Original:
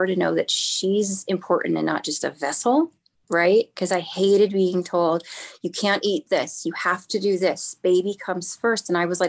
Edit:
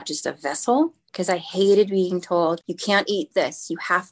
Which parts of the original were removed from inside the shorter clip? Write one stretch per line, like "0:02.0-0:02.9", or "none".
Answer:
0:03.1-0:03.8
0:05.3-0:05.7

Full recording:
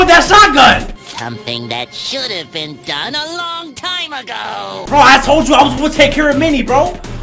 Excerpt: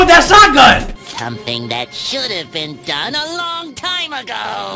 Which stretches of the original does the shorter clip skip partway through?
none

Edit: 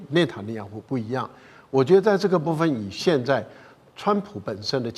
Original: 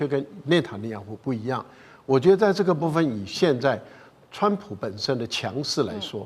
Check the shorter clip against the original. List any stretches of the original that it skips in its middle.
none

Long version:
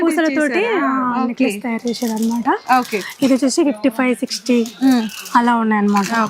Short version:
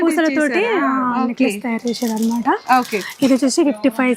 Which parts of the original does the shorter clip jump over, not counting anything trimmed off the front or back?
none

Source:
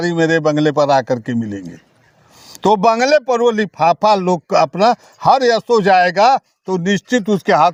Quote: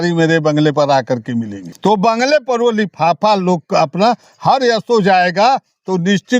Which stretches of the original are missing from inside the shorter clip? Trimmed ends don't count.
0:01.6-0:02.4

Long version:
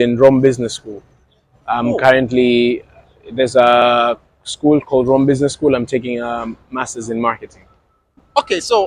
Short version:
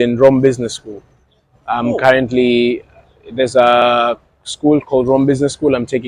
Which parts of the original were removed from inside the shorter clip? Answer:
none

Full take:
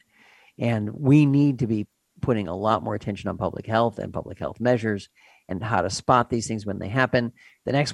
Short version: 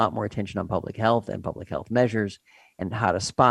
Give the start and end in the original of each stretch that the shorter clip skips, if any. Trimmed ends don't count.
none

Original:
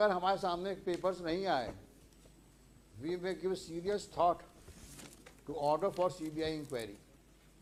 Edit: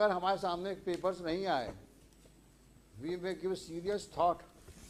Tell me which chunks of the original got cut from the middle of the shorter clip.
none

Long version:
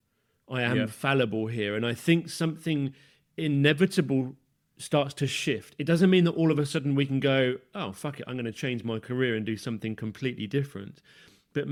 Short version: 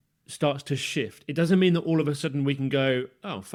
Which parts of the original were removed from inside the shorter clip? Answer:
none

